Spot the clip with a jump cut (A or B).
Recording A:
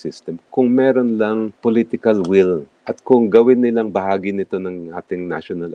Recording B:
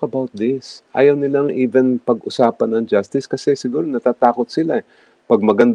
A